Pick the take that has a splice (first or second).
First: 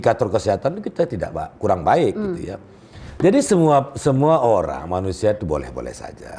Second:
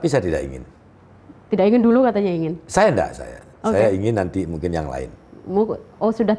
first